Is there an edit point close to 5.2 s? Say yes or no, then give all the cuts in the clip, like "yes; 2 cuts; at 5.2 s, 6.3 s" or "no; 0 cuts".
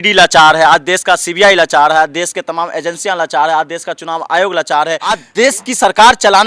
yes; 1 cut; at 5.2 s